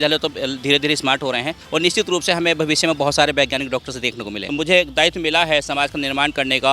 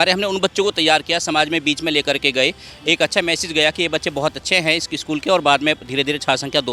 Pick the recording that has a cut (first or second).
first